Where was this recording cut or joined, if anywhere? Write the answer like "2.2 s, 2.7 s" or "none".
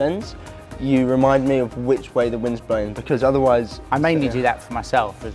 3.8 s